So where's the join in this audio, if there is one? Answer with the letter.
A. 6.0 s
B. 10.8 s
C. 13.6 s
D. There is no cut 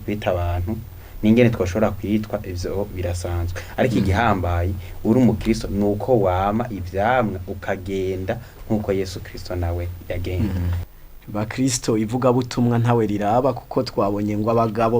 B